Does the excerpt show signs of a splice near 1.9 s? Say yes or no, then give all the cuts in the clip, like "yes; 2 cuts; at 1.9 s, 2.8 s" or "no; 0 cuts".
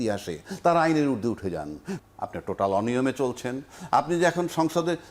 yes; 1 cut; at 1.9 s